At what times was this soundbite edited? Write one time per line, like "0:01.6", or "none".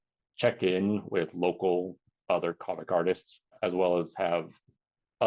0:03.6